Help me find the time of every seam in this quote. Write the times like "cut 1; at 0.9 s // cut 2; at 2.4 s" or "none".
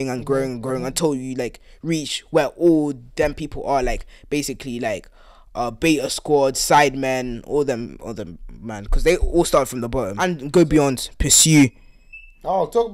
cut 1; at 10.2 s